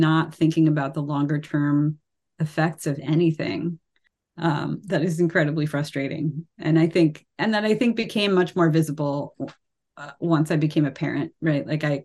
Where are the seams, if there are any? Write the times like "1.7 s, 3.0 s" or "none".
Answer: none